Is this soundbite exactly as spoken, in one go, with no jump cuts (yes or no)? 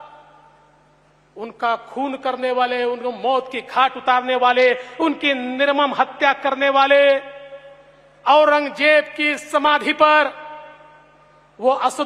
yes